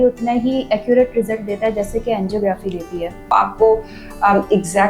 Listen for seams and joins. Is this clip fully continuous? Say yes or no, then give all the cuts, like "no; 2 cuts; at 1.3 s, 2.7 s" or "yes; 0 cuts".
no; 1 cut; at 3.3 s